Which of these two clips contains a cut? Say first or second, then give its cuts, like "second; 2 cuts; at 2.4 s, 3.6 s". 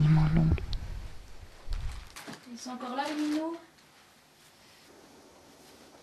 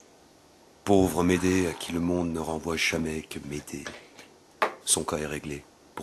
first; 1 cut; at 2.1 s